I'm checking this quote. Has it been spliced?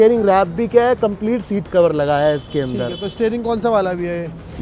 no; 0 cuts

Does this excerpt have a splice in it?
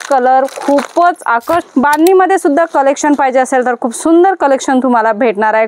yes; 1 cut; at 1.6 s

